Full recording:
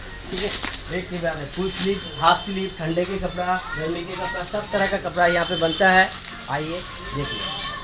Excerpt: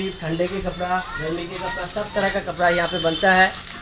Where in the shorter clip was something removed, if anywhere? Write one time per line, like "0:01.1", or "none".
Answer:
none

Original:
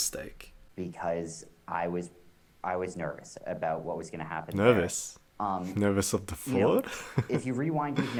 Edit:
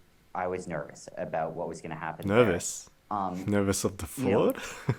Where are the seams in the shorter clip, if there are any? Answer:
none

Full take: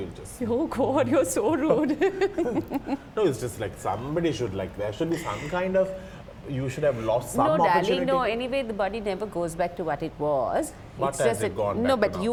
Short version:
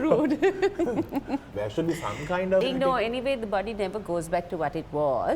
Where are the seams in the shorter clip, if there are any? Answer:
0:01.5
0:02.7

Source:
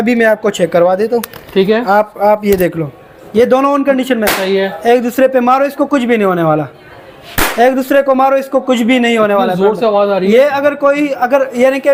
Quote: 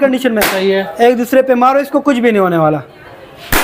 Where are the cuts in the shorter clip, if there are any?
none

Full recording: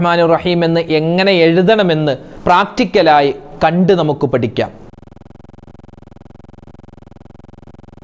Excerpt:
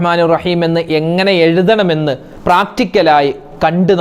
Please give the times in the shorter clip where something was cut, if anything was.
none

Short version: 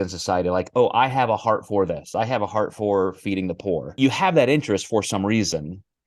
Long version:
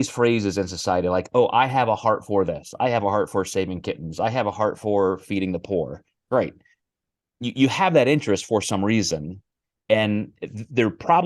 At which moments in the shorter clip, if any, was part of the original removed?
0:02.0
0:03.9

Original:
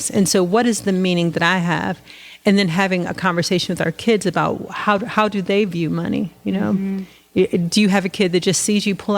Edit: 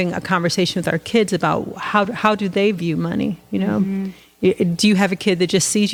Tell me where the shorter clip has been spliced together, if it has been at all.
none

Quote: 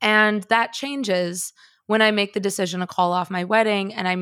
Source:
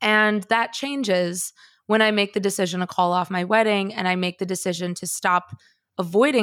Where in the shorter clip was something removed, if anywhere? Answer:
none

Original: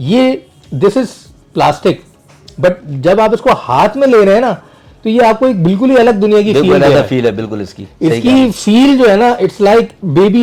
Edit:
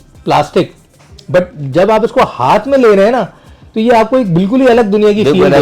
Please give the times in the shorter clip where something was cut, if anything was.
none

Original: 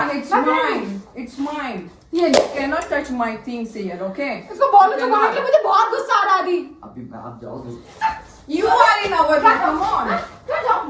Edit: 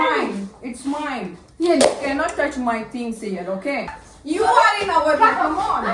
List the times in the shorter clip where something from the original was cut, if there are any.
0:04.0

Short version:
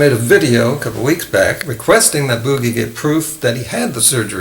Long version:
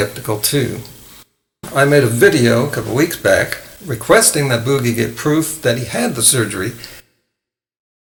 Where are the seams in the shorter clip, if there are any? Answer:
0:01.7

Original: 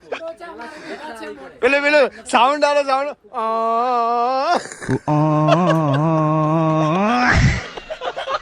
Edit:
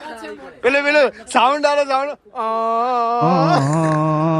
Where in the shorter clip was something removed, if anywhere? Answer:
0:03.5

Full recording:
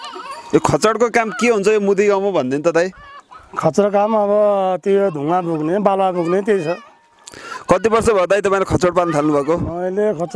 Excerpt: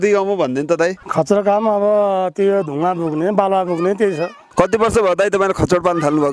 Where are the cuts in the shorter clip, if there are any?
0:01.0
0:04.4

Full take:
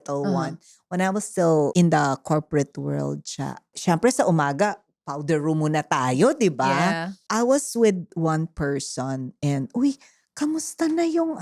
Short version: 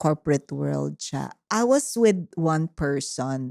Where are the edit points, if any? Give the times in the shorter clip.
0:01.4

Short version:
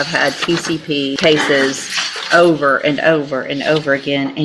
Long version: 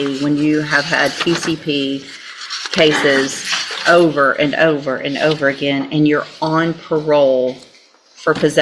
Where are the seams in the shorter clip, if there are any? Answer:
0:01.2

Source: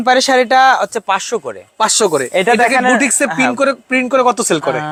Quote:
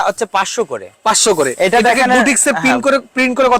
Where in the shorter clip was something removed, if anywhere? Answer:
none

